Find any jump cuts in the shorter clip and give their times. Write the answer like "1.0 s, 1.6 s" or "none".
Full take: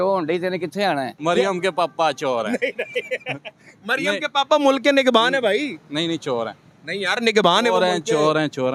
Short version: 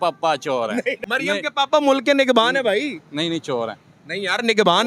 1.0 s